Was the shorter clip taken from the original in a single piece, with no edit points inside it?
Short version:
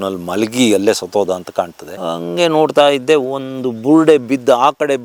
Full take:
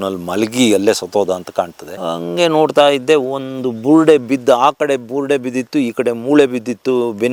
yes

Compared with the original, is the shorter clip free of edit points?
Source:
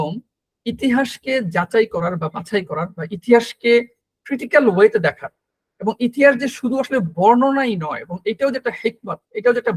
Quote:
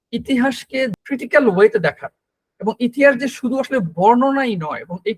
no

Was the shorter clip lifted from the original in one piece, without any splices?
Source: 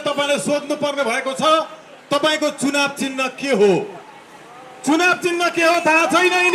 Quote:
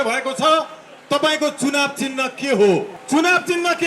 no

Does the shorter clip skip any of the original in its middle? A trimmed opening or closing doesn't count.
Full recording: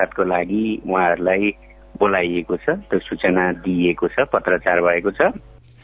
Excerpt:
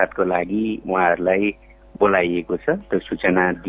no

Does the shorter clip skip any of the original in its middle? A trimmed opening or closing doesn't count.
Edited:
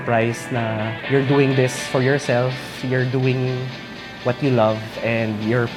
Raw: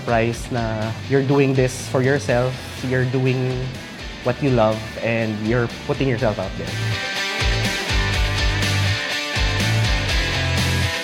no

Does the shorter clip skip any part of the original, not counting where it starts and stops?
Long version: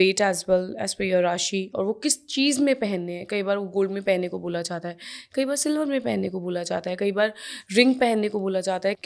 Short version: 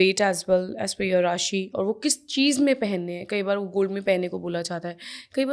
no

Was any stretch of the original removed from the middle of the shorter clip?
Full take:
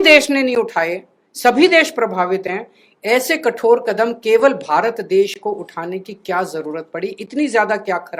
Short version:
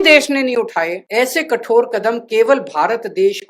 yes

